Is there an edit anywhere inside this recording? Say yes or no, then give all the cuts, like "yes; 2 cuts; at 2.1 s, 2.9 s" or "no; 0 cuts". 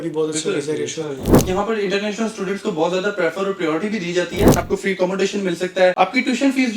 yes; 3 cuts; at 1.4 s, 4.6 s, 5.9 s